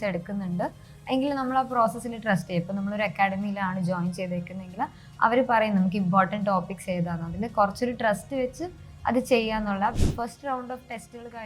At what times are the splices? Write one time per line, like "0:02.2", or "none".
0:10.0